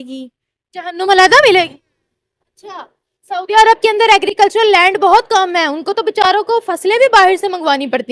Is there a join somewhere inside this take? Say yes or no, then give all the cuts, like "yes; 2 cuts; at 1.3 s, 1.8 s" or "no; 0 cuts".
no; 0 cuts